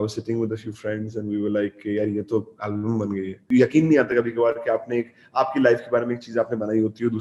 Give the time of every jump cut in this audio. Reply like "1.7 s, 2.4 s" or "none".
3.5 s